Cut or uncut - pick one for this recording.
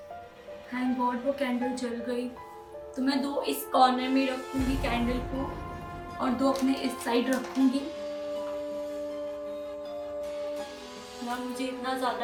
uncut